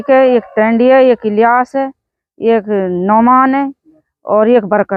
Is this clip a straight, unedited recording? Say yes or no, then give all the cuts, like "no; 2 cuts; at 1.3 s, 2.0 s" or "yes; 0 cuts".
yes; 0 cuts